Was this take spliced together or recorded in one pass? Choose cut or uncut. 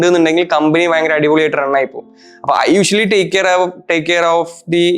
uncut